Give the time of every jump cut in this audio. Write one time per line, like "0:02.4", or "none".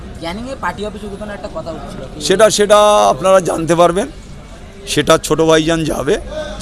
none